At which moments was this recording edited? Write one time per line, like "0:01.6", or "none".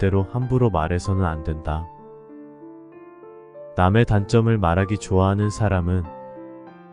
0:06.0